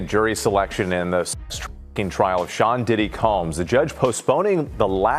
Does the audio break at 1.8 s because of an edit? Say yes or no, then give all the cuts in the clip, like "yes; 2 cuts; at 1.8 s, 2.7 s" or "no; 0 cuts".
no; 0 cuts